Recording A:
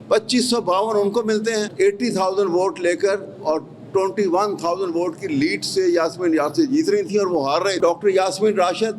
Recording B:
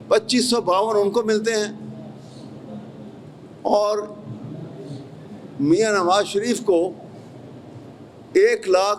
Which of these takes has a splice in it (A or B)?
A